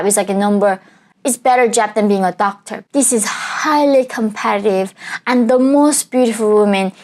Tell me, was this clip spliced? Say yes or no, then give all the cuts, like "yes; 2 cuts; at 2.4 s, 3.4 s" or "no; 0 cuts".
yes; 1 cut; at 2.7 s